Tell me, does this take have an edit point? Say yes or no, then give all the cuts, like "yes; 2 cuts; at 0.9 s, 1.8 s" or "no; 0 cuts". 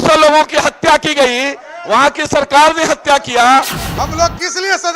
yes; 1 cut; at 3.8 s